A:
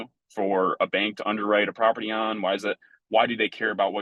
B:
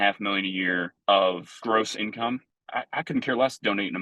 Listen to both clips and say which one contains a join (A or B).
B